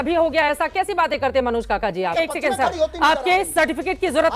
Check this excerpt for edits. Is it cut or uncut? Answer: cut